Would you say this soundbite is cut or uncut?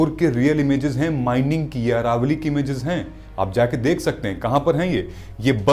uncut